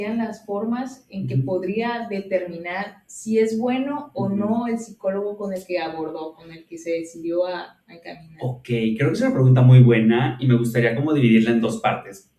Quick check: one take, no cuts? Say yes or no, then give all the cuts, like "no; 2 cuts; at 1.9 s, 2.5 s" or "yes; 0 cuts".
yes; 0 cuts